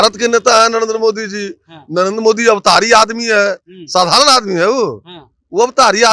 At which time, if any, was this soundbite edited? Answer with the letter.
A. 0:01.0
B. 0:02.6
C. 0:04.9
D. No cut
D